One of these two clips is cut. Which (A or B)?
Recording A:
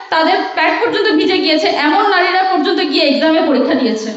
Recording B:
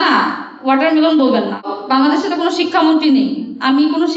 B